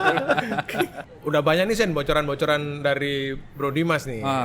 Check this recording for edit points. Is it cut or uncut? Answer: uncut